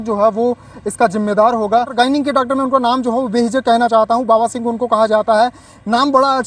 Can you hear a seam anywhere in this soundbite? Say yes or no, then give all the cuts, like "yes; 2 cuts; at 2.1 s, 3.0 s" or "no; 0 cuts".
yes; 1 cut; at 1.9 s